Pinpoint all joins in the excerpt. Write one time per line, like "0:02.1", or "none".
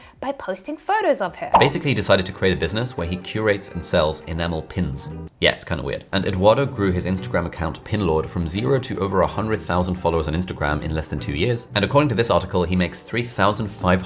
0:01.6